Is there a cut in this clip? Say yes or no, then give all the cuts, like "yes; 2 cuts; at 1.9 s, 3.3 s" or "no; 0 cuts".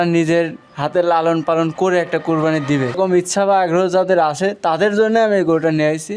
yes; 1 cut; at 3.0 s